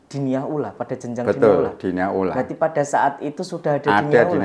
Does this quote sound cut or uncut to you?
uncut